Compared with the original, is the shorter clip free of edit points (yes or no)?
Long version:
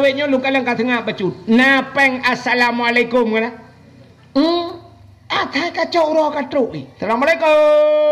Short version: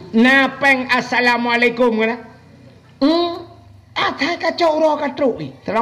yes